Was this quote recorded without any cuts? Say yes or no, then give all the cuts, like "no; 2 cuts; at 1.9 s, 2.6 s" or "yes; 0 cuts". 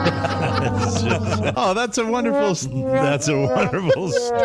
no; 1 cut; at 1.5 s